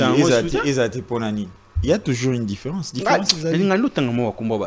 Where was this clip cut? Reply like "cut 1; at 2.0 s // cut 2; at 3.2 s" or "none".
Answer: none